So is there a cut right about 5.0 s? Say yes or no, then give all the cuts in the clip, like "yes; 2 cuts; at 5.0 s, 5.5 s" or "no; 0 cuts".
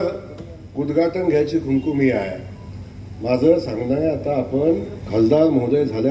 yes; 1 cut; at 5.0 s